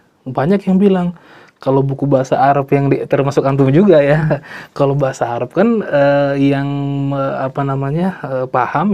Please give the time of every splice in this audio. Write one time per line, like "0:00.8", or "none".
none